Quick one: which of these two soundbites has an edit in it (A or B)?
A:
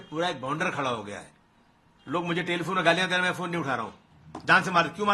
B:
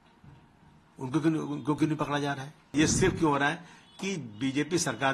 B